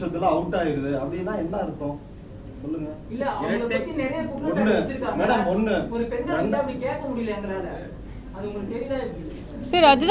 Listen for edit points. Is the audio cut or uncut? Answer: uncut